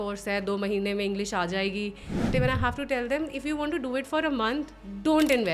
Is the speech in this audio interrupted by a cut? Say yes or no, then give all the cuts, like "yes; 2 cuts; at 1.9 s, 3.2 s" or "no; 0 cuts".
yes; 1 cut; at 2.3 s